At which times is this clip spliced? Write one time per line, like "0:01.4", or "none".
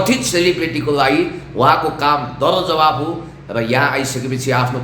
none